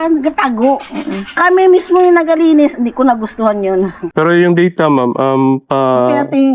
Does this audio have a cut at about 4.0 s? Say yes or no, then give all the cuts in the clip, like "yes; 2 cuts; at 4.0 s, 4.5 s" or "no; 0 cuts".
yes; 1 cut; at 4.0 s